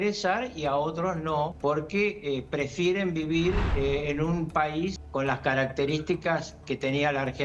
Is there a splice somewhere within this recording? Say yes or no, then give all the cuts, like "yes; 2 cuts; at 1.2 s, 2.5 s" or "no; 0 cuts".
yes; 3 cuts; at 1.5 s, 3.7 s, 5.0 s